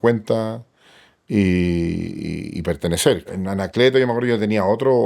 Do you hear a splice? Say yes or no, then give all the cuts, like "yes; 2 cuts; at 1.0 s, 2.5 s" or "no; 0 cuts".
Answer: yes; 1 cut; at 3.3 s